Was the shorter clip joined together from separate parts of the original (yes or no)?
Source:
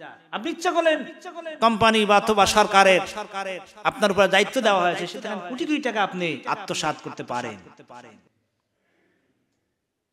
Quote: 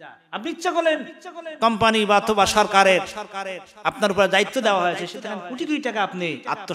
no